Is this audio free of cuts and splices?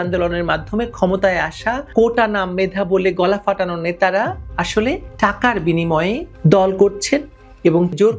yes; 0 cuts

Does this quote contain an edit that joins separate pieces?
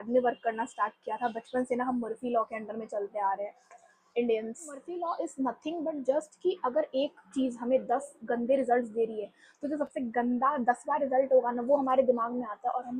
yes; 1 cut; at 4.9 s

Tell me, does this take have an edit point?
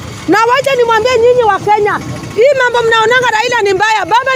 no; 0 cuts

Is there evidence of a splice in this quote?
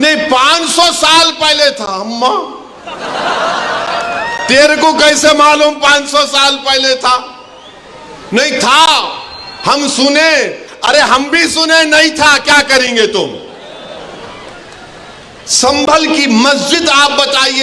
no; 0 cuts

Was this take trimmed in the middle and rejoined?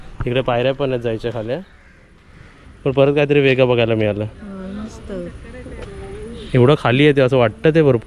no; 0 cuts

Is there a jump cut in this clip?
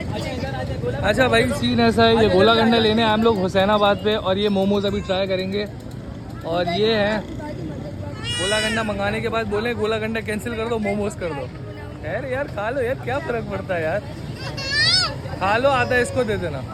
no; 0 cuts

